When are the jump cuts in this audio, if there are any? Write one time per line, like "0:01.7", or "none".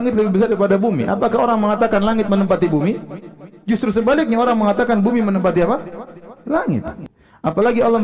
0:07.0